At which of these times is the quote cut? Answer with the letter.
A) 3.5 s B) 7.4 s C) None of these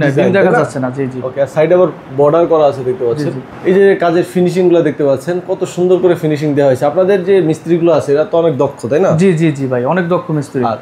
A